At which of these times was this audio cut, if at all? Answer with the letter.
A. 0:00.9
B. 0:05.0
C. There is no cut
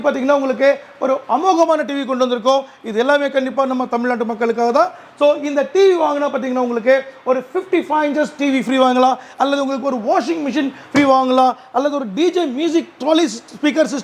C